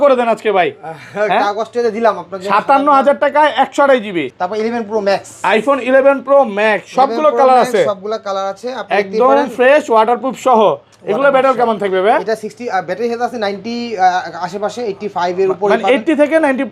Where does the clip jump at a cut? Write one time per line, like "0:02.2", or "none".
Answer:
0:04.3